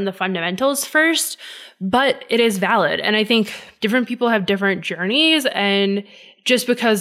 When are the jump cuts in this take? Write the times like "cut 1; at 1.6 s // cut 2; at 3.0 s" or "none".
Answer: cut 1; at 3.6 s

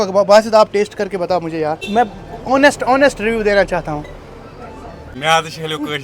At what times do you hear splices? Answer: cut 1; at 1.8 s // cut 2; at 5.1 s

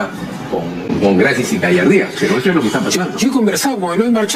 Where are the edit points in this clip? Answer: none

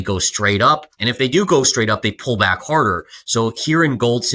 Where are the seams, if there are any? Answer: cut 1; at 1.0 s

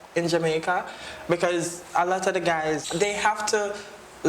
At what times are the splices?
cut 1; at 2.8 s

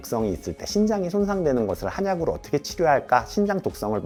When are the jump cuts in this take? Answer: none

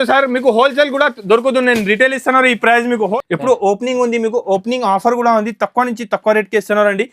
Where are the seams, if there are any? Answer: cut 1; at 3.1 s

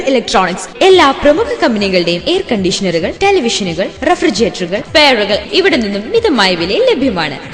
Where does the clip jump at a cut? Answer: cut 1; at 4.8 s

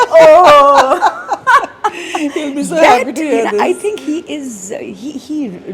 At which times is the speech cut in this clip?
none

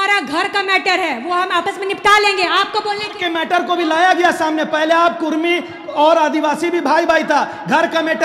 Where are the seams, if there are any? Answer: none

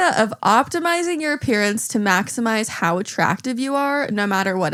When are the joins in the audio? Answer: none

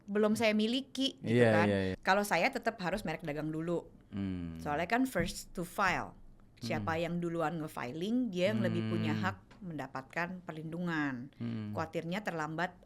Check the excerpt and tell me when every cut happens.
cut 1; at 1.9 s

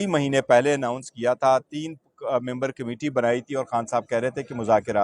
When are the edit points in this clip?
none

